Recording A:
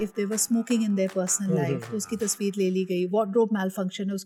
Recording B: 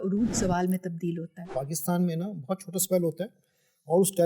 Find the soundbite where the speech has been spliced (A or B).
B